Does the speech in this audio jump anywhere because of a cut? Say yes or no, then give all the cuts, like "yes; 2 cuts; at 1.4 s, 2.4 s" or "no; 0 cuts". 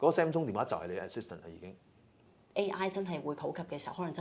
yes; 1 cut; at 2.3 s